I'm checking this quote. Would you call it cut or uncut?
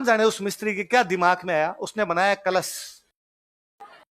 uncut